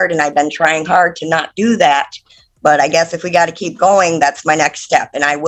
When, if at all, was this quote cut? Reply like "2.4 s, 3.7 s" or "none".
none